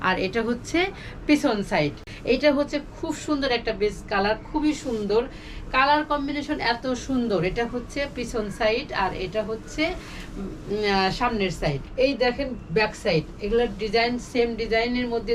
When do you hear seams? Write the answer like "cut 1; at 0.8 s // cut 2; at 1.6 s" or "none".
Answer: cut 1; at 2.1 s // cut 2; at 11.8 s